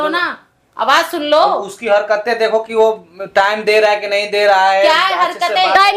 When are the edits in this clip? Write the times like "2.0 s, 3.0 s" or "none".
none